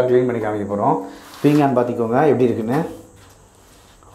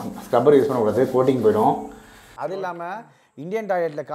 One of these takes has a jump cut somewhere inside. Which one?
second; 1 cut; at 2.2 s

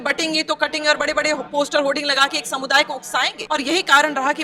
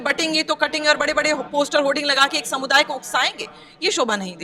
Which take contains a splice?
first; 1 cut; at 3.4 s

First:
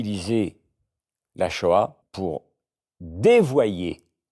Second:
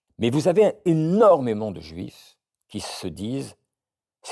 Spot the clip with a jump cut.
first; 1 cut; at 2.1 s

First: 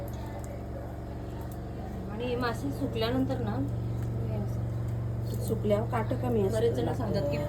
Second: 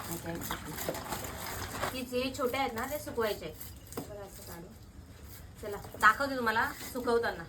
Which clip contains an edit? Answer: second; 1 cut; at 1.9 s

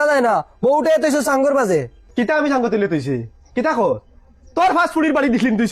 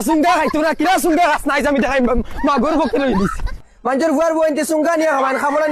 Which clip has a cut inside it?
second; 1 cut; at 3.7 s

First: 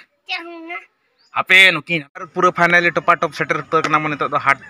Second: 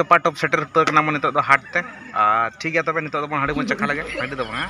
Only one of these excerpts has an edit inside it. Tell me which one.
first; 1 cut; at 2.1 s

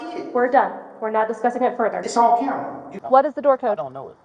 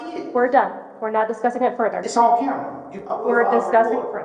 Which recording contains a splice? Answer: first; 1 cut; at 2.9 s

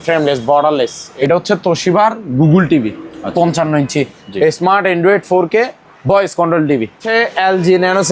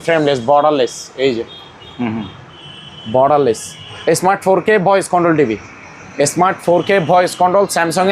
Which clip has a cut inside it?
first; 2 cuts; at 1.0 s, 7.0 s

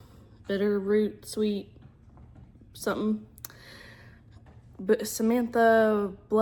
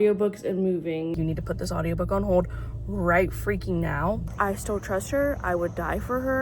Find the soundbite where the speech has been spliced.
second; 2 cuts; at 1.1 s, 4.3 s

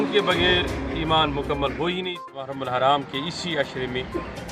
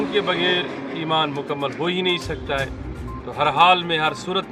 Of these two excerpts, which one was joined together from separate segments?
first; 1 cut; at 2.5 s

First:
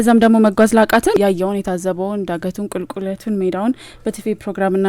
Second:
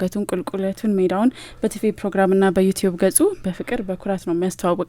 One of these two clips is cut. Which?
first; 1 cut; at 1.1 s

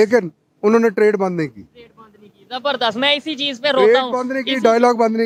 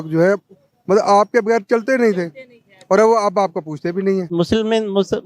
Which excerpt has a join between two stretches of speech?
second; 1 cut; at 4.3 s

